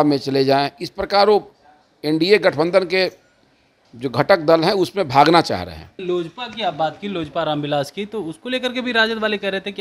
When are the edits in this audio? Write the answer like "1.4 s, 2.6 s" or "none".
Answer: 6.0 s